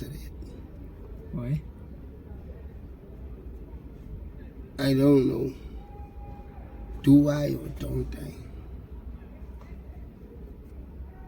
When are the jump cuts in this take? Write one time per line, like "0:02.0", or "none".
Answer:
none